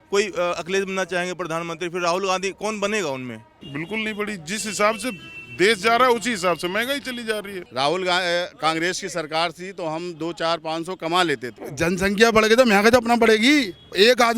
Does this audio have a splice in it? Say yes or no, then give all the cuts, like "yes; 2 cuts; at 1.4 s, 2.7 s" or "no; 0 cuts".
yes; 3 cuts; at 3.5 s, 7.6 s, 11.6 s